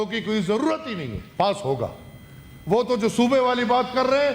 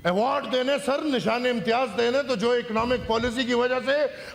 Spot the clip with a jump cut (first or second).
first